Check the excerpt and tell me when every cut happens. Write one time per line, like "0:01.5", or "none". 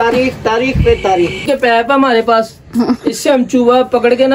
0:01.4